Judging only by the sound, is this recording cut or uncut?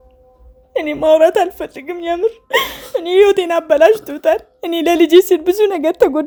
uncut